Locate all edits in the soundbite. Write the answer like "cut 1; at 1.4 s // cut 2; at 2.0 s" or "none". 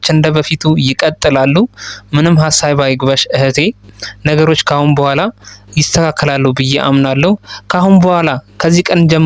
none